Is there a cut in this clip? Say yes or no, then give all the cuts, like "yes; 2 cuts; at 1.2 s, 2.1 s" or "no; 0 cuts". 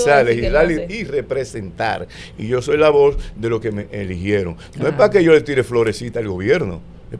no; 0 cuts